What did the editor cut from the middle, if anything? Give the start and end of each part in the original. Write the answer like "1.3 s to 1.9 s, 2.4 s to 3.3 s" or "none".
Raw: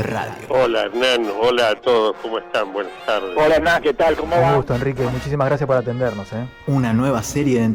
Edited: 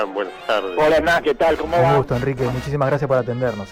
none